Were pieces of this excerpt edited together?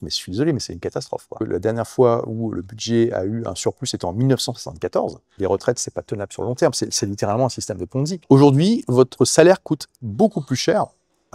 yes; 4 cuts; at 1.4 s, 5.3 s, 8.2 s, 9.1 s

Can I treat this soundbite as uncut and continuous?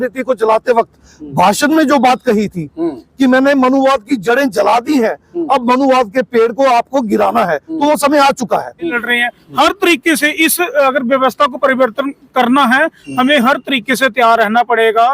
no; 1 cut; at 9.0 s

